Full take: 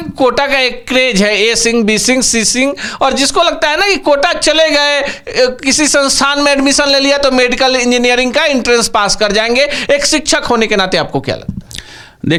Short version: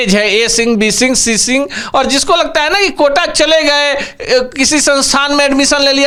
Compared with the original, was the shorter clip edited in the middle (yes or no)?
no